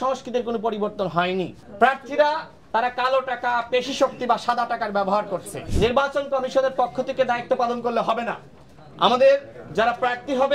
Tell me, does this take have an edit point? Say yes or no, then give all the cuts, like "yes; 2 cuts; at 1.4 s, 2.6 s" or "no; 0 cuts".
yes; 2 cuts; at 1.6 s, 5.6 s